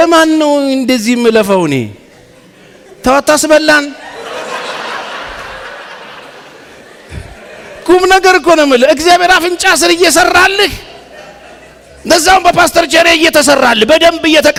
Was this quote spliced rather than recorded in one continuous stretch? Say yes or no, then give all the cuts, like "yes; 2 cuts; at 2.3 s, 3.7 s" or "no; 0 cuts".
no; 0 cuts